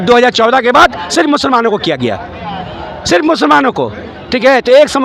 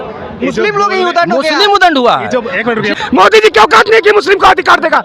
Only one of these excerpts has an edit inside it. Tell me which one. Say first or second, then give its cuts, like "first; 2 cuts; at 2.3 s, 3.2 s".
second; 1 cut; at 3.0 s